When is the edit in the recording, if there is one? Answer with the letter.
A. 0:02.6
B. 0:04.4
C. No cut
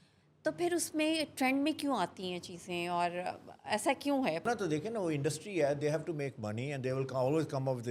B